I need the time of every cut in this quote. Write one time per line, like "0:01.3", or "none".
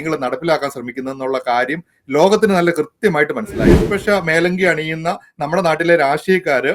0:03.9